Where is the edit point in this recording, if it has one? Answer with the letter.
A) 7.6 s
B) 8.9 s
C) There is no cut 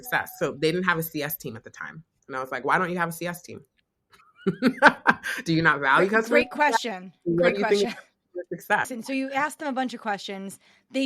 B